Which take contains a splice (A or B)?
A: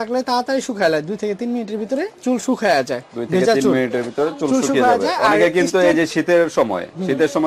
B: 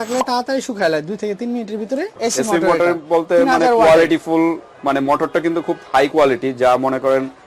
B